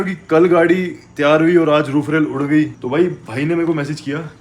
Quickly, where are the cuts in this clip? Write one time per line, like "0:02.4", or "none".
0:02.8

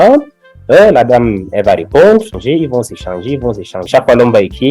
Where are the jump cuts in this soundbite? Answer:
0:02.4
0:03.9

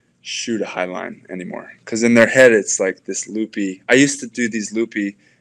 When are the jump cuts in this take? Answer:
none

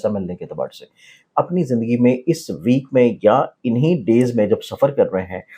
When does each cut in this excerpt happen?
0:01.1

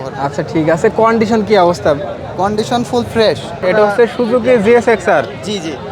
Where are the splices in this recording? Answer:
0:03.5

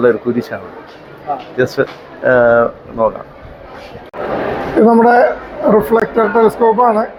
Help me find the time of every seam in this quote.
none

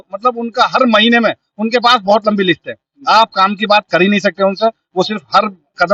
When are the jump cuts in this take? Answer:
none

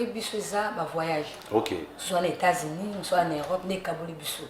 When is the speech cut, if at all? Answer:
none

